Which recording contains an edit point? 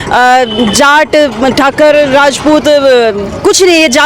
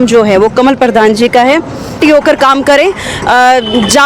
second; 1 cut; at 2.0 s

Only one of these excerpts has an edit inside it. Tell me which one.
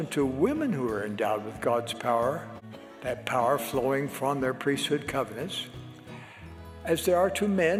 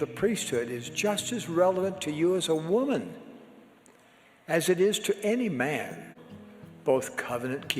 second; 1 cut; at 6.1 s

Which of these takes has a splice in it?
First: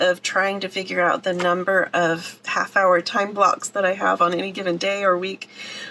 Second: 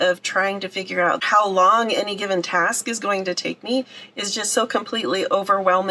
second; 1 cut; at 1.2 s

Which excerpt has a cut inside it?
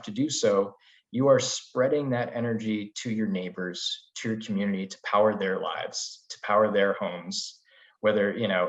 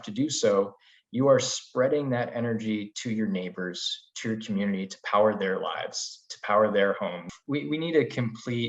second; 1 cut; at 7.4 s

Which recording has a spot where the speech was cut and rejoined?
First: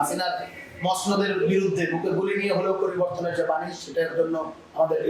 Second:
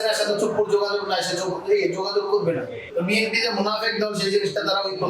second; 1 cut; at 2.8 s

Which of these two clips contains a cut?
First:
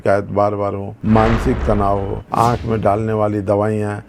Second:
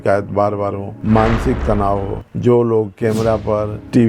first; 1 cut; at 2.2 s

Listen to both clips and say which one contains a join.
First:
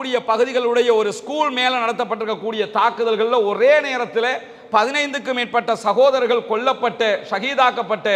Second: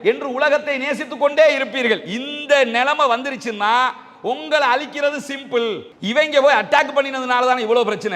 second; 1 cut; at 5.9 s

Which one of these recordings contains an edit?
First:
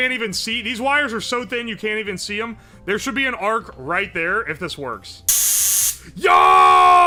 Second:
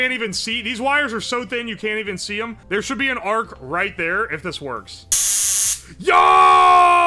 second; 1 cut; at 2.6 s

